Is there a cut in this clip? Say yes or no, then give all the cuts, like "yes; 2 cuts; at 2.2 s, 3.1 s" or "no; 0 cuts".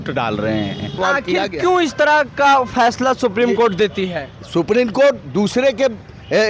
yes; 1 cut; at 1.0 s